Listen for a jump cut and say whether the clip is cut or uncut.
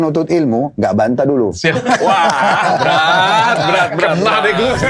uncut